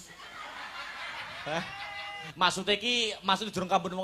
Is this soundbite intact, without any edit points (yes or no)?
no